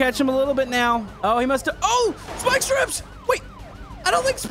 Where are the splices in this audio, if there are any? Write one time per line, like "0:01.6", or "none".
0:01.1